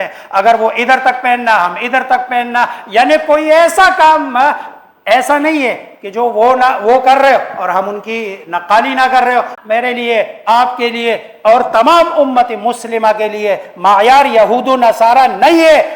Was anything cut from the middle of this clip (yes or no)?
yes